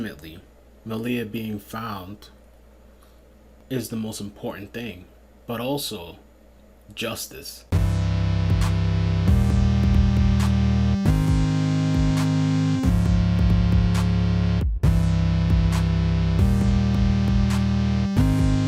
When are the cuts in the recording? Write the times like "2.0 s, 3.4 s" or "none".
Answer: none